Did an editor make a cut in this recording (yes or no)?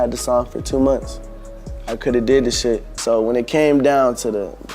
yes